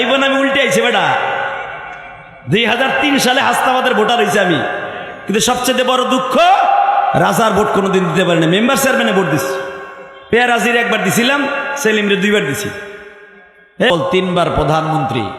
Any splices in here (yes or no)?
yes